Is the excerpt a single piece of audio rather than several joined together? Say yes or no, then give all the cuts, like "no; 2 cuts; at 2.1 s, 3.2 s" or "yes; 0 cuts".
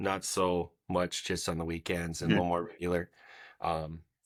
yes; 0 cuts